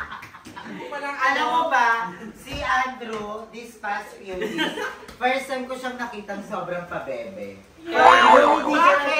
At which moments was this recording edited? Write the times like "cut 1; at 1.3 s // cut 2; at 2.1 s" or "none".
cut 1; at 0.9 s